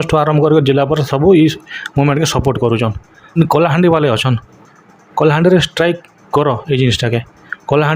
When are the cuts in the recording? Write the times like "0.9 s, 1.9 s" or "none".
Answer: 3.4 s